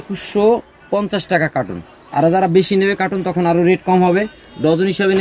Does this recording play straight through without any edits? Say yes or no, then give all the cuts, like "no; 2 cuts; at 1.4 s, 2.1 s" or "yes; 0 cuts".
yes; 0 cuts